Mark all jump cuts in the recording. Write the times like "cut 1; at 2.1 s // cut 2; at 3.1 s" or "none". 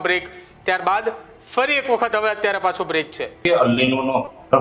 cut 1; at 3.5 s